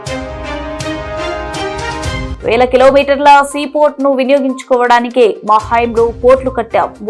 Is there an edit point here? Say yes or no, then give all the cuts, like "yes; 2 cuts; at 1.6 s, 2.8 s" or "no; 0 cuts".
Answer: yes; 1 cut; at 2.3 s